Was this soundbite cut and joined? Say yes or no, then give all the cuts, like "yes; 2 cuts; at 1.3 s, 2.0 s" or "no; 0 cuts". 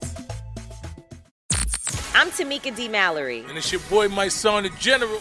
yes; 1 cut; at 1.3 s